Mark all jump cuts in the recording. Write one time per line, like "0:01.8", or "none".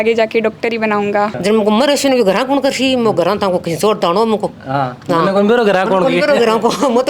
0:01.4